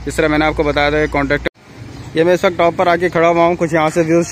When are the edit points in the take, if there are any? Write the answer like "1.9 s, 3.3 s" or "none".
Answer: 1.4 s